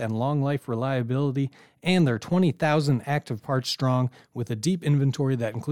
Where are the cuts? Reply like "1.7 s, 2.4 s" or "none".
none